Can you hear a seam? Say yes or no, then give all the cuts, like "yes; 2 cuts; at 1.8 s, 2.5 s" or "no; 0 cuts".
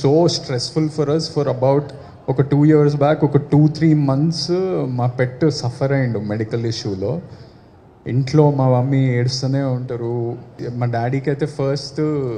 yes; 1 cut; at 10.6 s